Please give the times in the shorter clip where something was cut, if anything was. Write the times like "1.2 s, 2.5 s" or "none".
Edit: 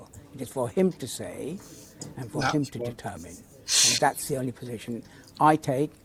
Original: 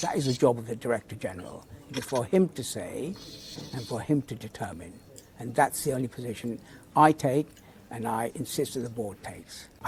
none